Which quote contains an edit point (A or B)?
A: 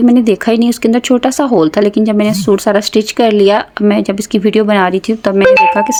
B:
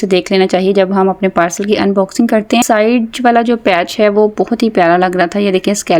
B